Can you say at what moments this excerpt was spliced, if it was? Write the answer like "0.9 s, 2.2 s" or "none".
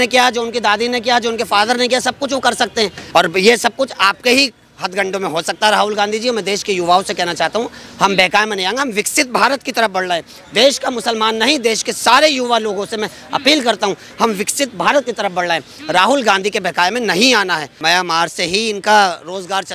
3.0 s, 17.7 s